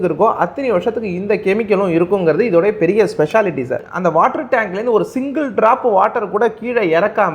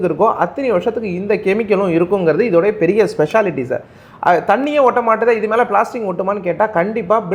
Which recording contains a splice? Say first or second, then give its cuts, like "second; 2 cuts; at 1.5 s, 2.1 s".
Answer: first; 1 cut; at 3.9 s